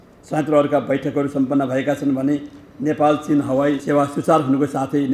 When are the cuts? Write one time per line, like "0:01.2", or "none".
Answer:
0:03.8